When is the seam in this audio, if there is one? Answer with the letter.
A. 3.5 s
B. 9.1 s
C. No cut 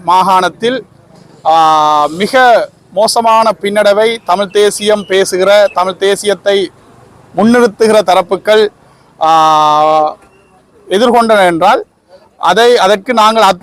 C